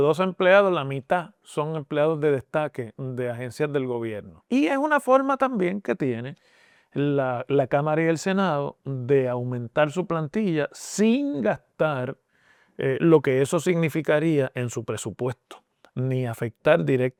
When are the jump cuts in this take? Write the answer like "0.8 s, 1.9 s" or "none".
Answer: none